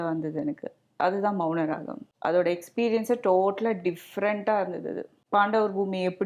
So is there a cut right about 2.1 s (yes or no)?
yes